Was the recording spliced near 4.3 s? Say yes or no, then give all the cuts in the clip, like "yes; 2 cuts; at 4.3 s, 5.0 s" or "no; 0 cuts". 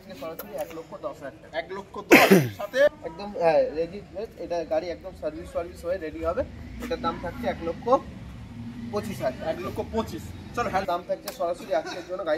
no; 2 cuts; at 3.0 s, 10.8 s